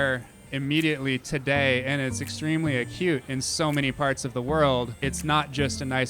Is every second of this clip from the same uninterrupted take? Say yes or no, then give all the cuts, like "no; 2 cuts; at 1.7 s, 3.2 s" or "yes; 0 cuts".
no; 1 cut; at 4.9 s